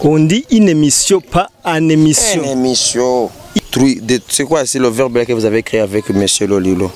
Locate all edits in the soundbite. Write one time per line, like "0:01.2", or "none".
0:03.6